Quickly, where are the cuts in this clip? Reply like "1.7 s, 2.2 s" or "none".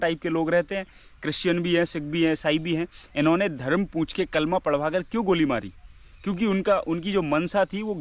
none